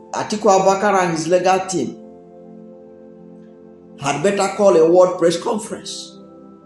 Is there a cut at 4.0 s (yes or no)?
yes